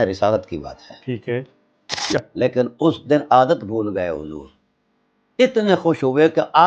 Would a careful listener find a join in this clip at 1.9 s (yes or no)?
yes